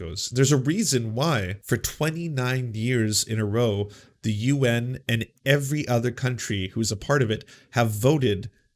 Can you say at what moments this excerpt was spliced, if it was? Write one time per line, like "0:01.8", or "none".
0:01.5